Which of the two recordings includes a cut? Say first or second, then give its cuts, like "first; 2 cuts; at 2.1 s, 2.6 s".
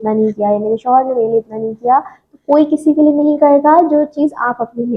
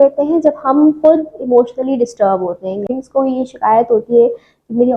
second; 1 cut; at 2.9 s